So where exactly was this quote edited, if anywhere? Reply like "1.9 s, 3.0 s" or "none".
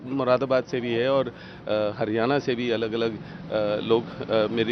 none